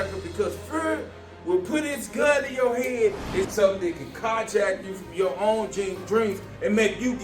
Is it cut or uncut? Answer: cut